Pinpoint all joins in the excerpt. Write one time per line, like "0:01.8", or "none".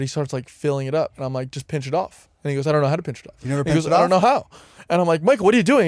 0:03.4